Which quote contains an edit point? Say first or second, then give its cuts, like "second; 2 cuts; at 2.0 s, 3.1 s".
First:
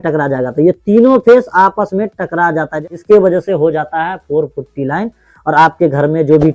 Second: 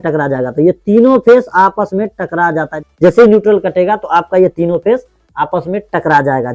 first; 1 cut; at 3.0 s